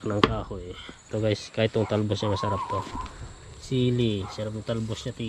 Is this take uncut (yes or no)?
no